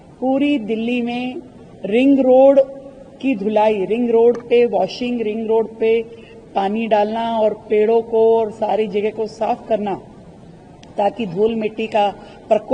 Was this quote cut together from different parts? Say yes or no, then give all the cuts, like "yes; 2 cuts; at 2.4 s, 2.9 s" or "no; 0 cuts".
no; 0 cuts